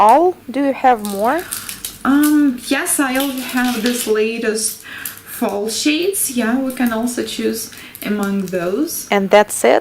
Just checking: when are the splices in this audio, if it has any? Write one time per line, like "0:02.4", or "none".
0:07.5